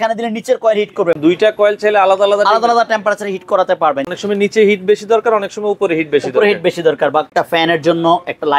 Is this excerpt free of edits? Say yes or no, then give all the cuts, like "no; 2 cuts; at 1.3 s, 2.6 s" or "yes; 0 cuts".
no; 3 cuts; at 1.2 s, 4.0 s, 7.3 s